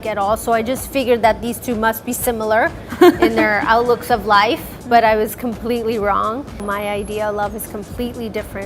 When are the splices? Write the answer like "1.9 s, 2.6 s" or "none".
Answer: 6.6 s